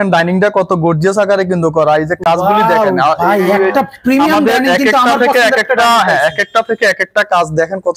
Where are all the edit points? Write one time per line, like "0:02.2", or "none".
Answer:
none